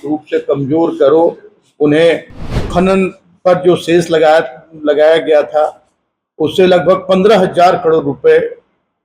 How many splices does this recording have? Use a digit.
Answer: 1